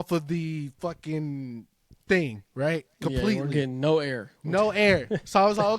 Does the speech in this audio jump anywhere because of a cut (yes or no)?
no